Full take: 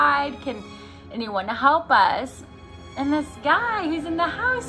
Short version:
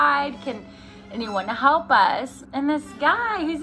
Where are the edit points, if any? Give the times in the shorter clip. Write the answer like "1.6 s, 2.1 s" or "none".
2.4 s